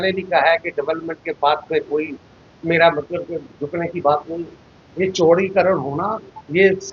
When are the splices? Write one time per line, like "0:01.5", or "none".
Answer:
0:04.8

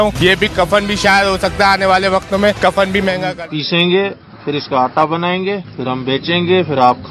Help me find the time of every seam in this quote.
0:03.3

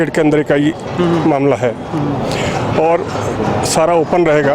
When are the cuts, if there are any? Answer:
none

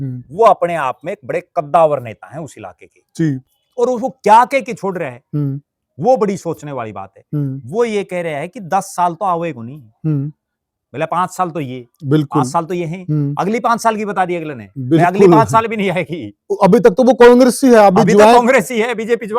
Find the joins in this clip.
0:03.5

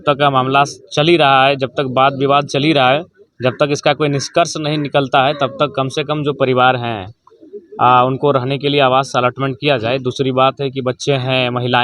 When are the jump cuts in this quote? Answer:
none

